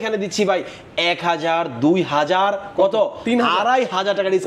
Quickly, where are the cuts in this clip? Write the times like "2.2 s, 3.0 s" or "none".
none